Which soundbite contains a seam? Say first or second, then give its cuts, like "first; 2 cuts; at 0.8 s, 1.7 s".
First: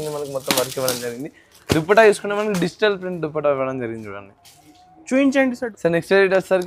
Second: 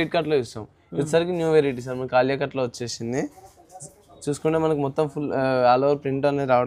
first; 1 cut; at 5.7 s